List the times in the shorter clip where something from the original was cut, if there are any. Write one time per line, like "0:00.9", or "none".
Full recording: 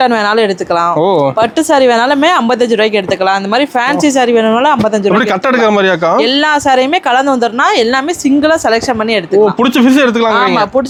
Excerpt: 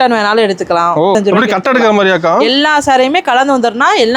0:01.1